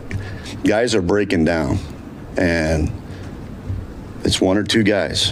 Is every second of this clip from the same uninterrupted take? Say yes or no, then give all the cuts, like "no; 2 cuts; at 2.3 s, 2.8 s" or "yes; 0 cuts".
yes; 0 cuts